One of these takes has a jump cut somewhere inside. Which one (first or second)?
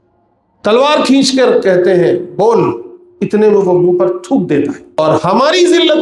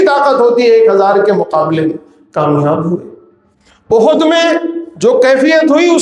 first